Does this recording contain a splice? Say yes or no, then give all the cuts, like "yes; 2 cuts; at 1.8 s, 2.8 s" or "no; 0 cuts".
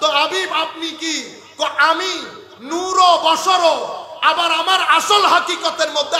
no; 0 cuts